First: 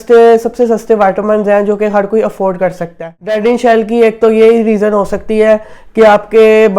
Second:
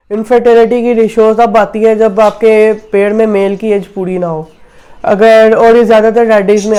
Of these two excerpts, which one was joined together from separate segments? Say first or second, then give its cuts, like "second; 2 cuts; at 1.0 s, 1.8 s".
first; 1 cut; at 3.4 s